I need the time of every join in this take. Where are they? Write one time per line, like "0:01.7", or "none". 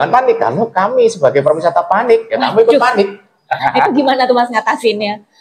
0:03.6